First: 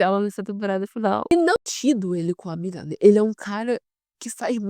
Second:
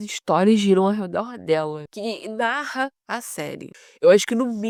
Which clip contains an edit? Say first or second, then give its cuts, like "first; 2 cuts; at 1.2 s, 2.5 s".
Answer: first; 1 cut; at 1.5 s